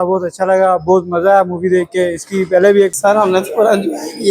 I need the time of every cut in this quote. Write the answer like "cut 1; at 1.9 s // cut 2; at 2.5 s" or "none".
cut 1; at 3.0 s